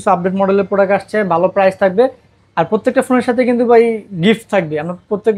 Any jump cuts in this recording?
no; 0 cuts

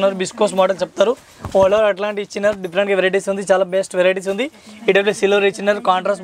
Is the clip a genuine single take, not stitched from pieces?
yes; 0 cuts

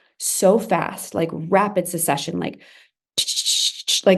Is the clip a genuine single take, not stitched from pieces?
yes; 0 cuts

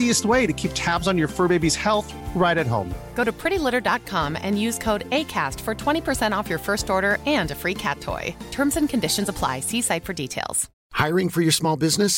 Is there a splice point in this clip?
no; 0 cuts

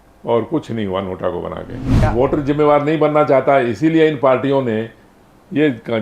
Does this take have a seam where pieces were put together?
yes; 1 cut; at 1.8 s

